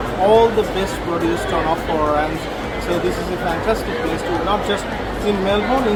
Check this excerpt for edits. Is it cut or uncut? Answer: uncut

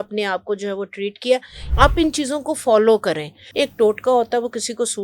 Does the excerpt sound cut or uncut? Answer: cut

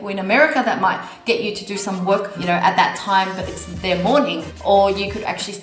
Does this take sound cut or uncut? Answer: cut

